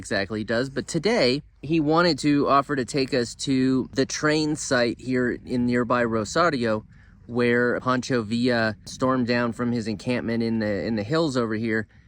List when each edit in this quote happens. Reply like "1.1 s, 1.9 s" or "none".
1.5 s, 3.9 s, 7.8 s, 8.9 s